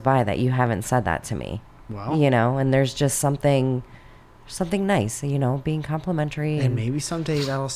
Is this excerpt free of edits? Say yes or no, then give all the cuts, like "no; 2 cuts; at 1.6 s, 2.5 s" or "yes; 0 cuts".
yes; 0 cuts